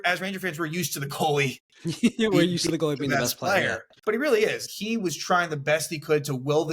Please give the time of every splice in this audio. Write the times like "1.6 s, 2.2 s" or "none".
3.9 s, 4.7 s